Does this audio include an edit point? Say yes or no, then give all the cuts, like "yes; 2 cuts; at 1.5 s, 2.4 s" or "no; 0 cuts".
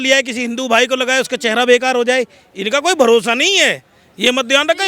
no; 0 cuts